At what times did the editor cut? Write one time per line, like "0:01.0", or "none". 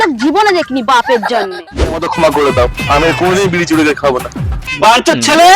0:01.8